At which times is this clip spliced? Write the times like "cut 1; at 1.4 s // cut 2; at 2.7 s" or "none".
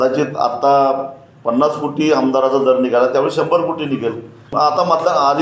cut 1; at 4.5 s